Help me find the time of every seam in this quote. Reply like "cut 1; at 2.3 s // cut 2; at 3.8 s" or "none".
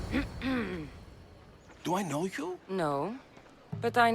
none